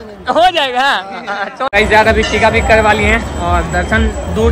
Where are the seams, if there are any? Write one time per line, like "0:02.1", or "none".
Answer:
0:01.7